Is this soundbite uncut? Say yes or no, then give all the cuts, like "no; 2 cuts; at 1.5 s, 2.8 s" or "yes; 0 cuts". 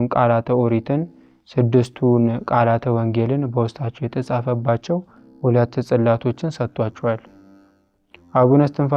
yes; 0 cuts